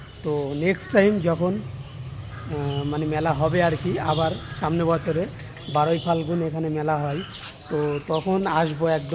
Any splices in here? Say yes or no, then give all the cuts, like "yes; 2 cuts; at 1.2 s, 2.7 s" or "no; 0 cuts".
no; 0 cuts